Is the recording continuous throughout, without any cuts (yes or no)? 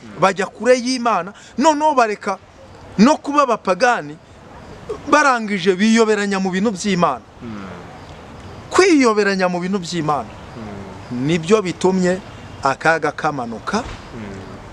yes